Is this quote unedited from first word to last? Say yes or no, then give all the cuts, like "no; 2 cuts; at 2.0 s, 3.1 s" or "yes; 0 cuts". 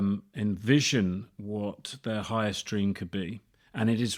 yes; 0 cuts